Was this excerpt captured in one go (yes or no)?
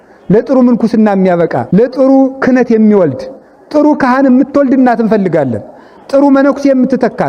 no